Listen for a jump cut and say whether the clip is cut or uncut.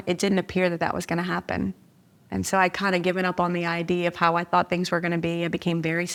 uncut